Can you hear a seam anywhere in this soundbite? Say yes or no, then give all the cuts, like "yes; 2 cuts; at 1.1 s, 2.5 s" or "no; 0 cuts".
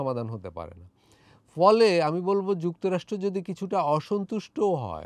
no; 0 cuts